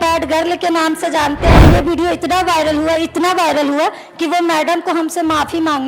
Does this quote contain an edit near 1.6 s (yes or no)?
yes